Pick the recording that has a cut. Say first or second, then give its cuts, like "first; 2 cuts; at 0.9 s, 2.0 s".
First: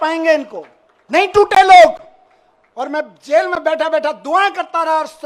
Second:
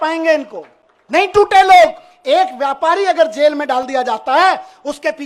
second; 1 cut; at 2.1 s